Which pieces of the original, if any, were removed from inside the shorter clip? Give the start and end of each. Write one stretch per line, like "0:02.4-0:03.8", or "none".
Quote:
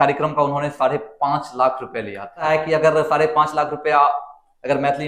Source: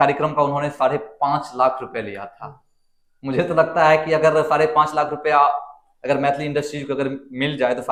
0:02.4-0:03.8